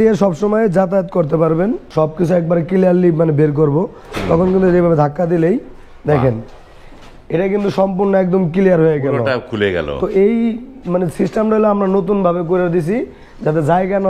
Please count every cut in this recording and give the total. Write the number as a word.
one